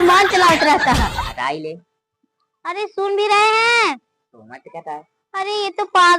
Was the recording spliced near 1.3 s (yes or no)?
yes